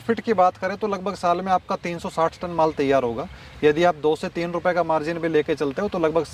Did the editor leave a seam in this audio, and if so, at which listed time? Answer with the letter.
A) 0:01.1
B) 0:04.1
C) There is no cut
C